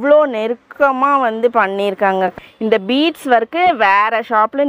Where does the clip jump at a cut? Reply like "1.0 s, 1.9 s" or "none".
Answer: 2.3 s